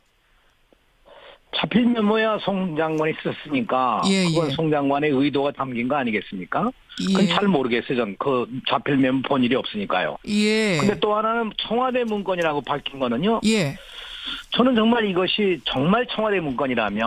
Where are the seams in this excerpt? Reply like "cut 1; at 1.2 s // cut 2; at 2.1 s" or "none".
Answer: cut 1; at 6.4 s